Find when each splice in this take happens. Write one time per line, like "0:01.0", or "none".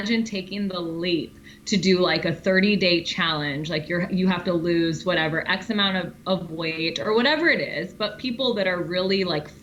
none